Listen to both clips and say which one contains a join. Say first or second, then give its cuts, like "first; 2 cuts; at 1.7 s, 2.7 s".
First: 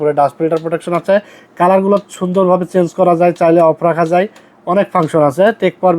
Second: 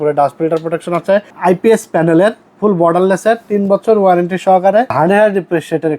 second; 2 cuts; at 1.3 s, 4.9 s